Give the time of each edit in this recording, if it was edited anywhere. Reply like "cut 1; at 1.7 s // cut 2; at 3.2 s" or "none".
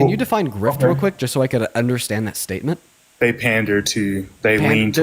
cut 1; at 3.0 s